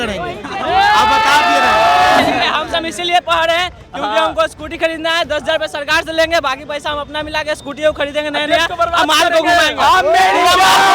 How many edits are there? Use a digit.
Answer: 1